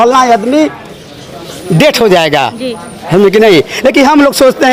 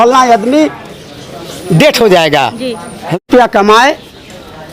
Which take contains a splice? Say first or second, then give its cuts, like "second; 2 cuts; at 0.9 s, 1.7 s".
second; 1 cut; at 3.2 s